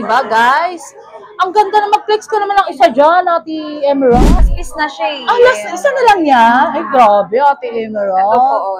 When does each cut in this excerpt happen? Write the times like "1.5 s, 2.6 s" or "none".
4.4 s